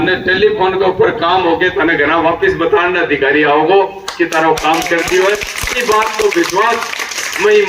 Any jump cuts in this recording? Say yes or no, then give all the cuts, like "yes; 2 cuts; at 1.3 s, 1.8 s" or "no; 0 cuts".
no; 0 cuts